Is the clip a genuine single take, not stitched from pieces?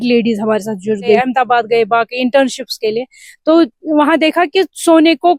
no; 1 cut; at 1.2 s

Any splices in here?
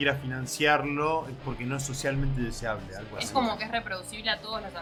no; 0 cuts

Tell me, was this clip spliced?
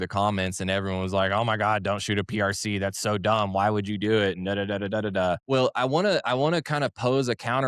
yes; 1 cut; at 5.4 s

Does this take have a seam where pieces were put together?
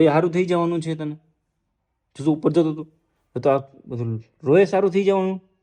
no; 0 cuts

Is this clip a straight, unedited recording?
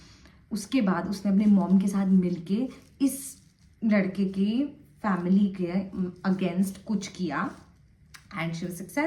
yes; 0 cuts

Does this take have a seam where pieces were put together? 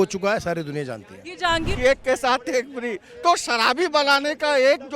yes; 1 cut; at 1.5 s

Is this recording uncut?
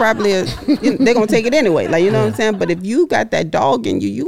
yes; 0 cuts

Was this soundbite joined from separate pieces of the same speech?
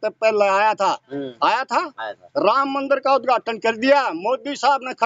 no; 0 cuts

